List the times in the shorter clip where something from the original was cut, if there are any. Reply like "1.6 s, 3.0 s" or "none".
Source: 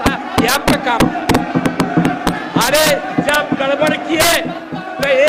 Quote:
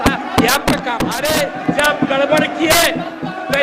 1.2 s